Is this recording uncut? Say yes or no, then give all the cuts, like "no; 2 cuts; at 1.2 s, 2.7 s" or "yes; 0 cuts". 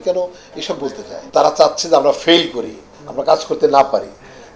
no; 1 cut; at 1.1 s